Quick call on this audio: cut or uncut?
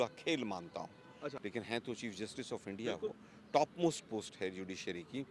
cut